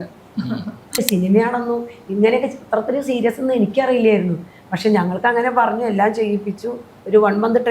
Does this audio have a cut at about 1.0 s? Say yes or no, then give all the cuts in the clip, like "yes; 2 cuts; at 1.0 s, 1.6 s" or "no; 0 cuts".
yes; 1 cut; at 1.0 s